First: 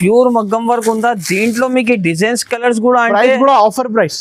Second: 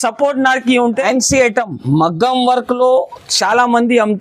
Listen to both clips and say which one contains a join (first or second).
second